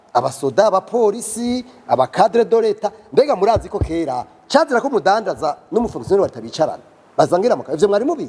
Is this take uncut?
yes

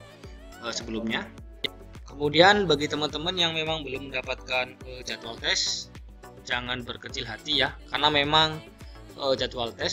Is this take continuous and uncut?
no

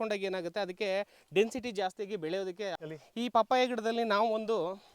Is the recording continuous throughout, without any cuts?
no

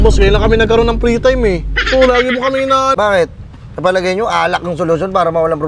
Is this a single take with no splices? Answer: no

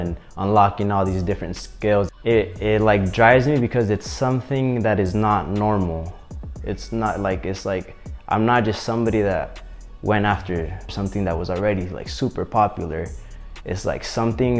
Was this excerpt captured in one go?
no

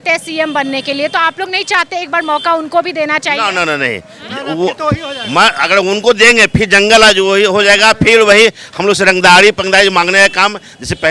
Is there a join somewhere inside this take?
no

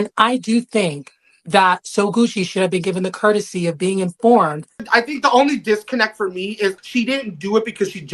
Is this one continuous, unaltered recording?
no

